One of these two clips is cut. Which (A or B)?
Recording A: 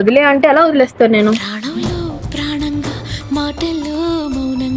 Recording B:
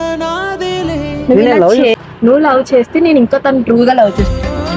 B